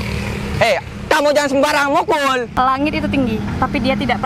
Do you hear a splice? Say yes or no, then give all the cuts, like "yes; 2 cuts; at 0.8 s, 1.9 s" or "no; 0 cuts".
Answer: yes; 1 cut; at 2.5 s